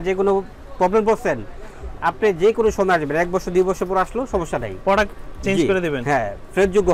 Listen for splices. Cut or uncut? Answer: uncut